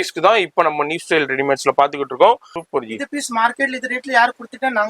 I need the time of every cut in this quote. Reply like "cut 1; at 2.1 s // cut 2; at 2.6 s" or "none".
cut 1; at 2.5 s